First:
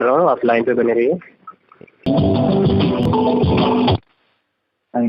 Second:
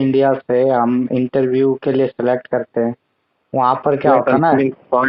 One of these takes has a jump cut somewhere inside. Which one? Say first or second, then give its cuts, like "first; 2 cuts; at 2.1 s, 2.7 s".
first; 2 cuts; at 2.1 s, 3.0 s